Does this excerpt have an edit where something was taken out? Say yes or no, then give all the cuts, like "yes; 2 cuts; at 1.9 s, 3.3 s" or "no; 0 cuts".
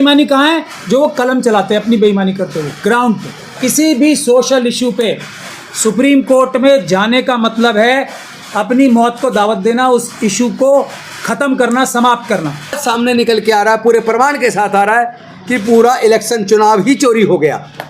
yes; 2 cuts; at 3.5 s, 12.8 s